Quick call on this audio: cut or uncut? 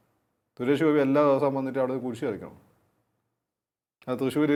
uncut